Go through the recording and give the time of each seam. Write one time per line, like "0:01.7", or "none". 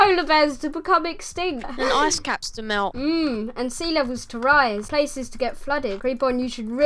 0:01.7
0:02.9
0:04.9
0:06.0